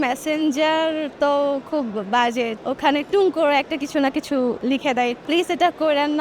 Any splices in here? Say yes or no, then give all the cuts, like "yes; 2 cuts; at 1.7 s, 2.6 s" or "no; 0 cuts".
yes; 2 cuts; at 2.6 s, 4.7 s